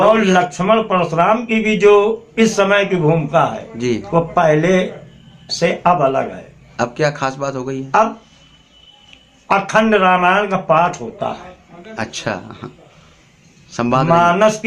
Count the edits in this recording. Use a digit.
0